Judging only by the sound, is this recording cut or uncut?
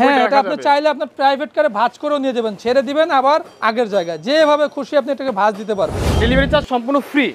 cut